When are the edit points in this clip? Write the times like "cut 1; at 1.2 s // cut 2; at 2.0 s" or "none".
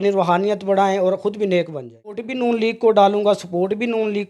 cut 1; at 2.3 s

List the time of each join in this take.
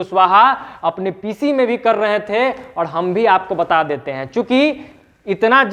none

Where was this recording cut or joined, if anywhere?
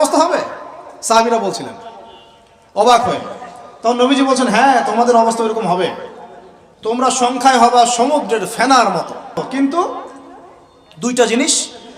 cut 1; at 9.4 s

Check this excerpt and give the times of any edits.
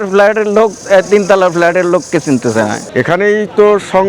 cut 1; at 2.8 s

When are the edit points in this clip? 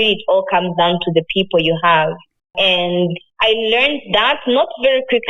none

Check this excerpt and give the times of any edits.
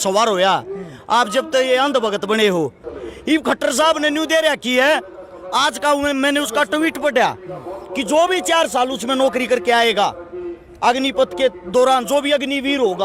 cut 1; at 2.9 s

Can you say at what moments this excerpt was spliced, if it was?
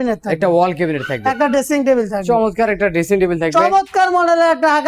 none

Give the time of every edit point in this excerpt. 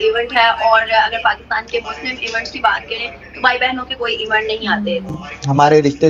cut 1; at 5.1 s

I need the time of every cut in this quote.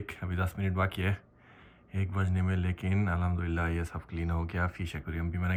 none

